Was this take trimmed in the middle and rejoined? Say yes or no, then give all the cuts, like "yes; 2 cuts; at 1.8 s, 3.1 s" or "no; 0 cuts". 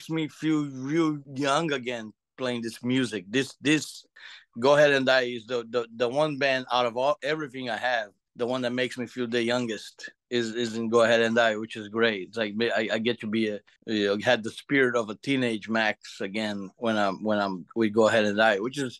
yes; 1 cut; at 1.3 s